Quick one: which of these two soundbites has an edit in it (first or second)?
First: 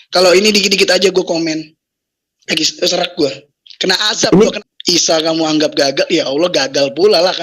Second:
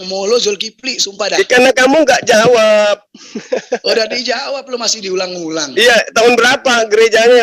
first